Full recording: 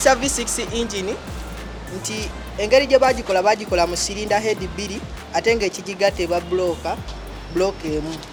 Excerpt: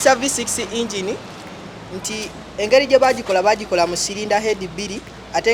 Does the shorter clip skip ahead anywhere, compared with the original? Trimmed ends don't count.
no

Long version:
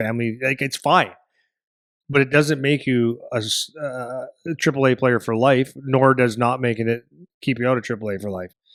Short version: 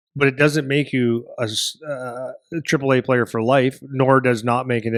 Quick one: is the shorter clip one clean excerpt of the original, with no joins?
yes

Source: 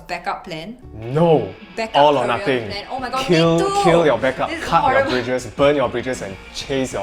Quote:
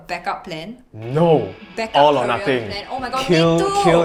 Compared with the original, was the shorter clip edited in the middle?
no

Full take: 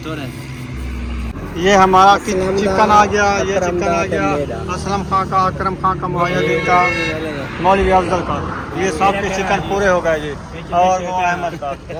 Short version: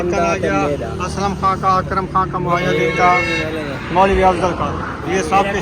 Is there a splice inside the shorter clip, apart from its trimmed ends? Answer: no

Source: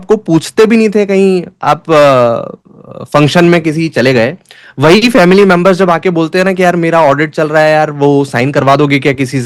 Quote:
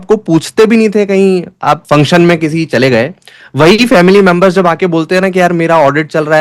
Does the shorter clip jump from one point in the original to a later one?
yes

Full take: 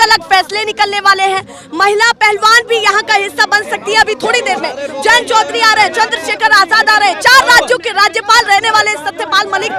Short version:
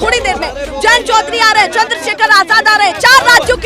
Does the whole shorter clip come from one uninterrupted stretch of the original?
yes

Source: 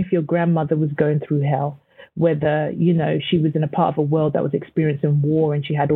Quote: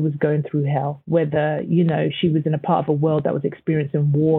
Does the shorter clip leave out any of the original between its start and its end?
yes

